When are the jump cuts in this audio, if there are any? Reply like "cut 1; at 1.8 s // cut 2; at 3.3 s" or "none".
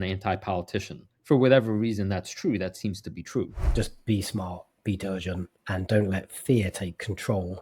cut 1; at 3.6 s // cut 2; at 5.5 s